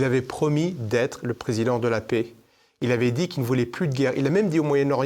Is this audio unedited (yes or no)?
yes